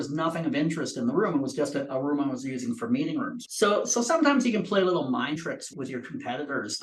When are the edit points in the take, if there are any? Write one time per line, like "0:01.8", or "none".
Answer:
0:05.4